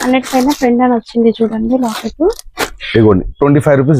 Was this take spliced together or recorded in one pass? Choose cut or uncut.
uncut